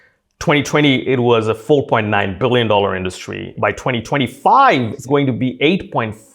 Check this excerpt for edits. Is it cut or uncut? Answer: cut